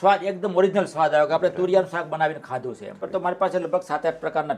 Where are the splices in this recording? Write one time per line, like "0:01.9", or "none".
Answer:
0:03.1